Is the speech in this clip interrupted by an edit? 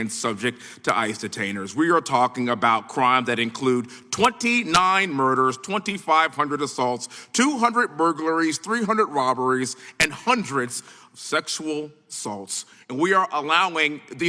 no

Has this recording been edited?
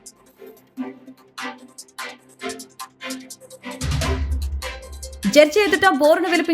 yes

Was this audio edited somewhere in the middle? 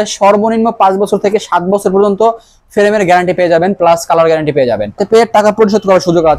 yes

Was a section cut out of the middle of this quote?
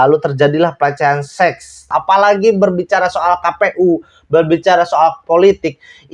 yes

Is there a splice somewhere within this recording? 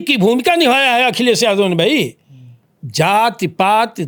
no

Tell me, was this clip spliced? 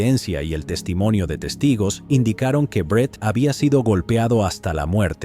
yes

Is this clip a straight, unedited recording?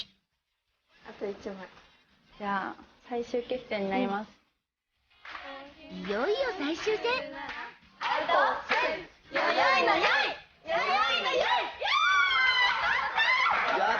no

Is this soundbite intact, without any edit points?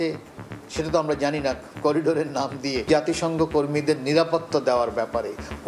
no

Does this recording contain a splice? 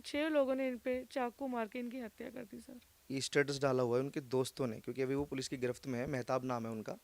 yes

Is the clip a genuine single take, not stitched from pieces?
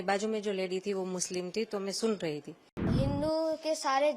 no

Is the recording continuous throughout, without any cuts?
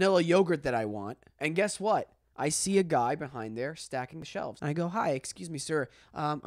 no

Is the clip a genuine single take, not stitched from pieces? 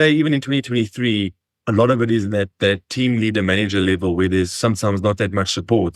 yes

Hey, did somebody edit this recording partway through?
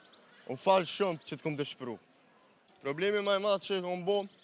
yes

